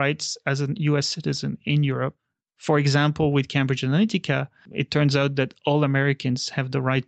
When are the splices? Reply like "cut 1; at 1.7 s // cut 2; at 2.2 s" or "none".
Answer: cut 1; at 2.2 s